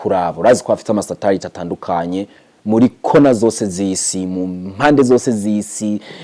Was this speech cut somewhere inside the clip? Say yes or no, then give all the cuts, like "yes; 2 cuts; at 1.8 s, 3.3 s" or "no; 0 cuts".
no; 0 cuts